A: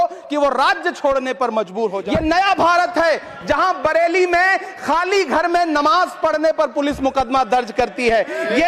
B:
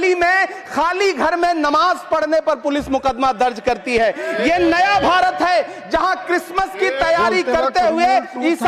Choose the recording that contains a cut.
A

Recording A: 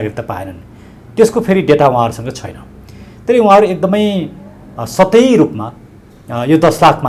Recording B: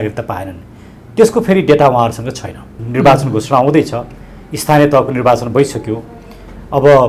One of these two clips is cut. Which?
B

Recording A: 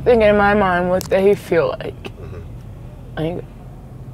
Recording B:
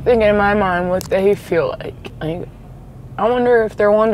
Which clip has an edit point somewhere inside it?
B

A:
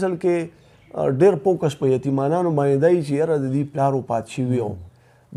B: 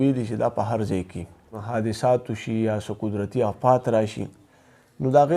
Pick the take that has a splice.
B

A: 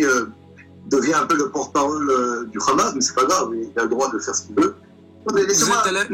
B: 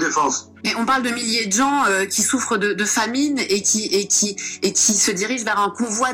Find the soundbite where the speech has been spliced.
A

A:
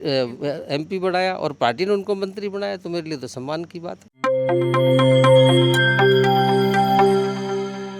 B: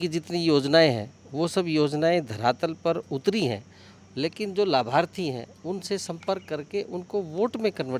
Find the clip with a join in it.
A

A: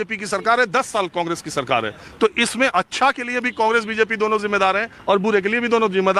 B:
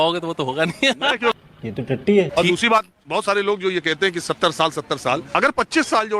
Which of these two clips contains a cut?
B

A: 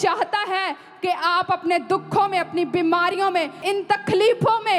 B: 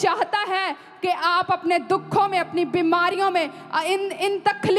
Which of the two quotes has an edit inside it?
A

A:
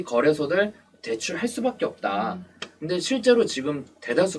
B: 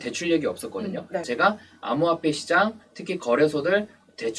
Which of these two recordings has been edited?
B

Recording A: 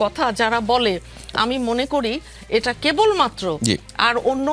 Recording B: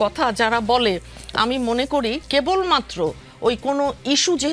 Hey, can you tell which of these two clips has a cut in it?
B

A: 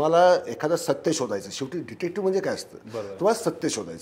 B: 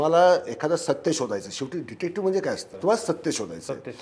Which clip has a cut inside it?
B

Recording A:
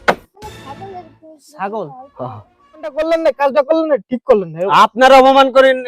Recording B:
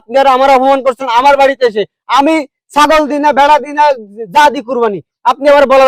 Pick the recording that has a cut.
A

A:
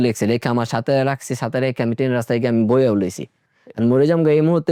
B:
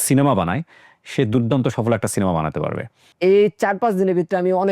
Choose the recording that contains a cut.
B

